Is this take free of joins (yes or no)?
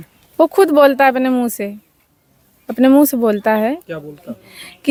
yes